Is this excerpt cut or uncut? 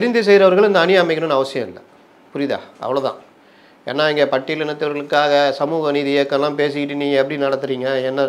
uncut